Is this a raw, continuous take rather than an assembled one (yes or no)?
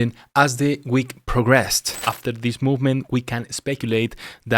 no